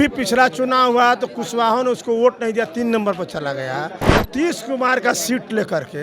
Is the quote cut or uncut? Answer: cut